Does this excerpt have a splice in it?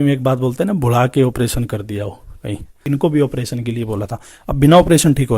yes; 1 cut; at 2.7 s

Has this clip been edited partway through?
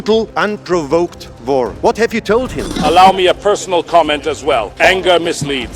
yes; 2 cuts; at 2.6 s, 4.7 s

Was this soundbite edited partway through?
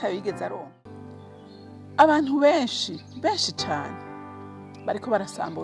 yes; 1 cut; at 1.3 s

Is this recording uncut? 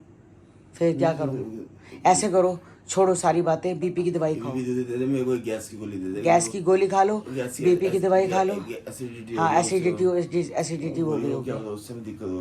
yes; 0 cuts

